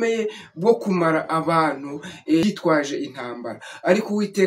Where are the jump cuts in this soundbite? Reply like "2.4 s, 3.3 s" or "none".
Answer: 2.4 s